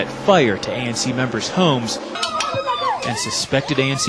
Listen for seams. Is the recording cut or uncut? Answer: uncut